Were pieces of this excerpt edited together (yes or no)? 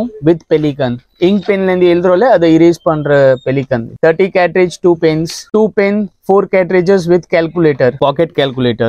no